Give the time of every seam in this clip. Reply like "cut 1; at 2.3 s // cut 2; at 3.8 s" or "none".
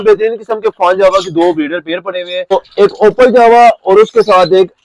cut 1; at 2.5 s